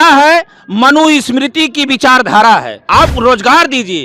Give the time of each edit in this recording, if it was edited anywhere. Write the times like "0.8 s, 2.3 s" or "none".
2.8 s